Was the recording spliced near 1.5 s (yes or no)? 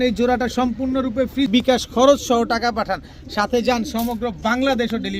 yes